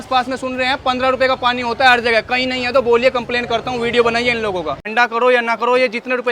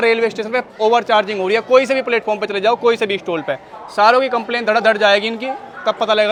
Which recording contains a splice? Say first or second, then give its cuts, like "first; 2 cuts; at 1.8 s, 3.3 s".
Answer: first; 1 cut; at 4.8 s